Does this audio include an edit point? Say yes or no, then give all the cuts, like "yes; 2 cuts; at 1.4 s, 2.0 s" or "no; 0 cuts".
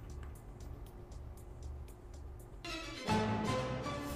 no; 0 cuts